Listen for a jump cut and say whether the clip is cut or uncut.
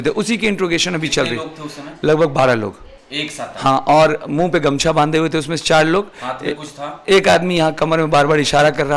uncut